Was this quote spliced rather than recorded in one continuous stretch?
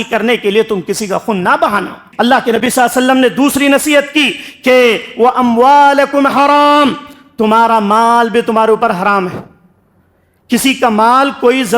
yes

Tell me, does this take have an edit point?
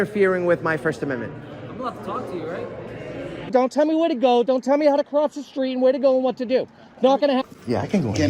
yes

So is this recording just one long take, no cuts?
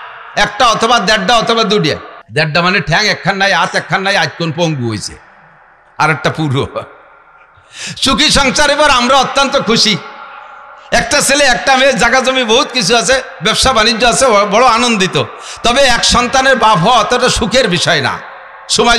no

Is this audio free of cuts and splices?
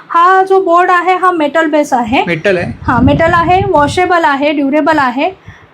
yes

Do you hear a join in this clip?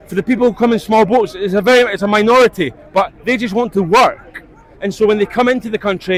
no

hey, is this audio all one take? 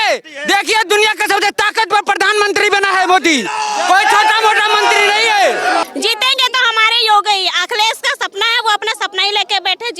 no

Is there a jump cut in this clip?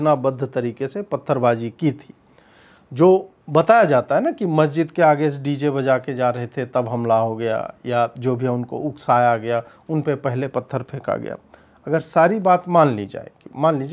no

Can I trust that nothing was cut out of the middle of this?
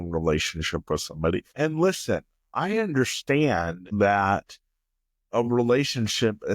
no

